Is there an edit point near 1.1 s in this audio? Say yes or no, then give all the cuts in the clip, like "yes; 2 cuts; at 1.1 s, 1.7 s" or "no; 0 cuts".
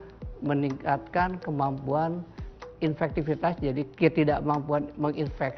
no; 2 cuts; at 2.7 s, 3.9 s